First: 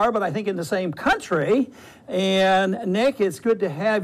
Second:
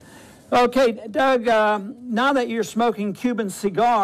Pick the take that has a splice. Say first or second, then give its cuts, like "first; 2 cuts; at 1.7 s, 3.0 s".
first; 1 cut; at 2.5 s